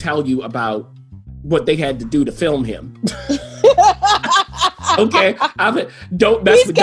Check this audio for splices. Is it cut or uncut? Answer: uncut